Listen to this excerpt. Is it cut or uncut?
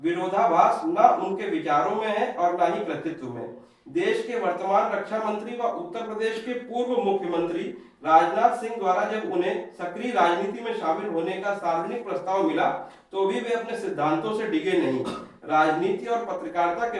uncut